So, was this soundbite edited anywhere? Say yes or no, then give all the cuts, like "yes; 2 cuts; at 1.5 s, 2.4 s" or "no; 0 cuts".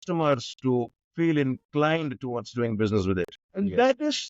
yes; 1 cut; at 3.4 s